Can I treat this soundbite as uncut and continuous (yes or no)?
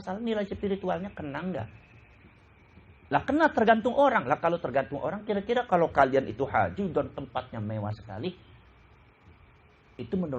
yes